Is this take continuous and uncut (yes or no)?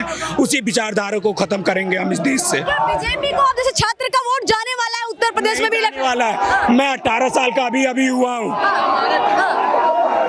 yes